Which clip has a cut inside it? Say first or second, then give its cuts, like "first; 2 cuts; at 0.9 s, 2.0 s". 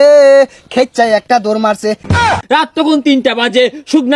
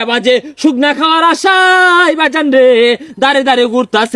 first; 1 cut; at 2.3 s